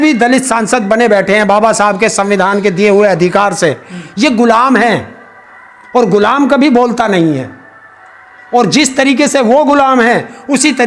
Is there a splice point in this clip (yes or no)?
no